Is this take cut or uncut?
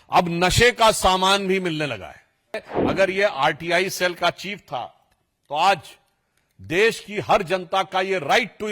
cut